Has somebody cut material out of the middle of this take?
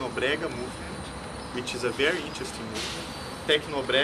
no; 0 cuts

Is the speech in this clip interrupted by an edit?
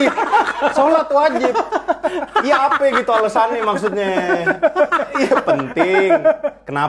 no; 0 cuts

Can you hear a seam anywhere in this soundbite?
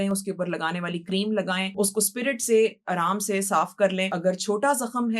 yes; 2 cuts; at 1.7 s, 4.1 s

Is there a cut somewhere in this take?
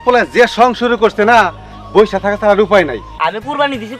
yes; 1 cut; at 3.0 s

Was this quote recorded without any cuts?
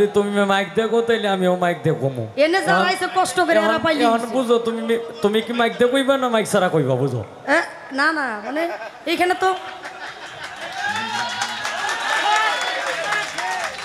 yes; 0 cuts

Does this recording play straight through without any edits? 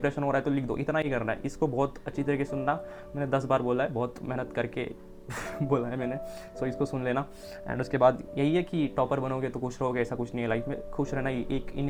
yes; 0 cuts

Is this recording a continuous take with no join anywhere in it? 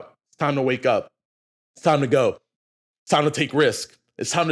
yes; 0 cuts

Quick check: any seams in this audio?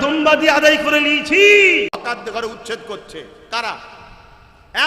yes; 1 cut; at 2.0 s

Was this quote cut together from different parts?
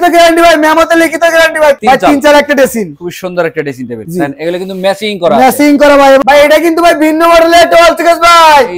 yes; 2 cuts; at 1.8 s, 6.2 s

